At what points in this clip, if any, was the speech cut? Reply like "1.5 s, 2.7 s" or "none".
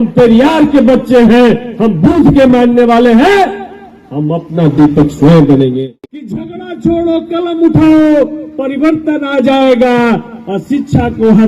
6.3 s